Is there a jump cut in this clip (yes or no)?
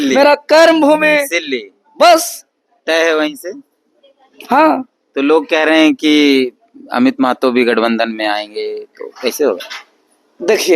no